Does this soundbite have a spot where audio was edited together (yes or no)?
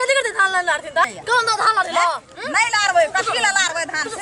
yes